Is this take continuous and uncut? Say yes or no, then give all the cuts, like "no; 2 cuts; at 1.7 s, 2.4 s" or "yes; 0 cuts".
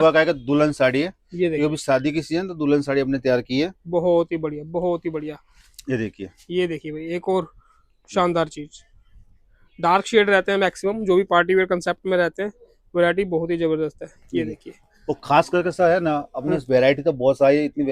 yes; 0 cuts